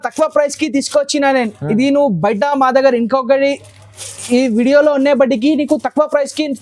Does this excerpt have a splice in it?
no; 0 cuts

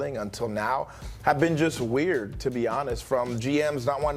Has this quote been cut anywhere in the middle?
no; 0 cuts

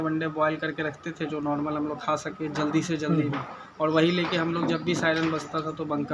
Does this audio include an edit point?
no; 0 cuts

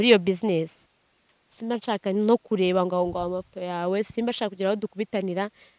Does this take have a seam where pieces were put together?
yes; 1 cut; at 1.2 s

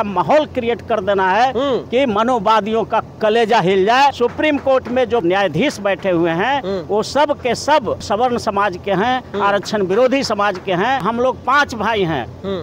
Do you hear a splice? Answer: yes; 4 cuts; at 4.2 s, 5.2 s, 8.1 s, 11.0 s

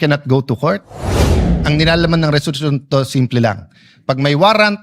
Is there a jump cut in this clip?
yes; 1 cut; at 1.2 s

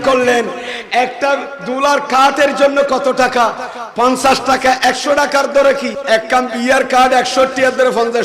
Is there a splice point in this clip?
yes; 1 cut; at 6.0 s

